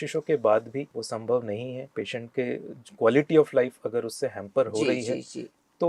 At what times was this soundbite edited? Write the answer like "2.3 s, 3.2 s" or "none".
1.0 s, 1.8 s